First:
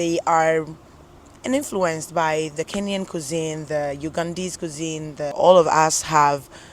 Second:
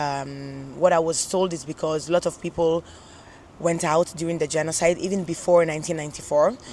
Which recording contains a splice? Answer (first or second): first